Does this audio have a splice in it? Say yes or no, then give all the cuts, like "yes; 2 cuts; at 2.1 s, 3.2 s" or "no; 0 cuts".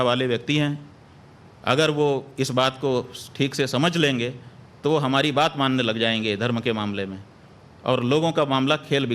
yes; 1 cut; at 5.9 s